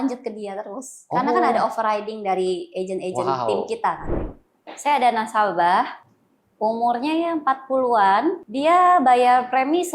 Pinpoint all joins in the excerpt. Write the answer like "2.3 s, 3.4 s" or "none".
4.1 s, 8.5 s